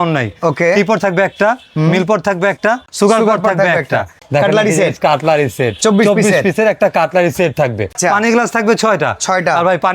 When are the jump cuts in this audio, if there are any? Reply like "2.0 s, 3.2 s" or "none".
2.9 s, 4.2 s, 7.9 s